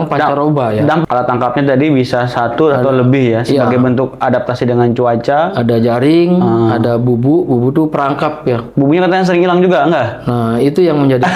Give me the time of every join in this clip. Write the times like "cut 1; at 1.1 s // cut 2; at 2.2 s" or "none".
cut 1; at 1.0 s